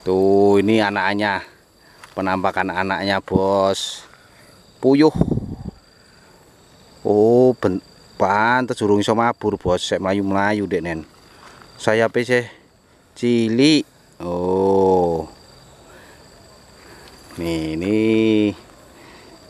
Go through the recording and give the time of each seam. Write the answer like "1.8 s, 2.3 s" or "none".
none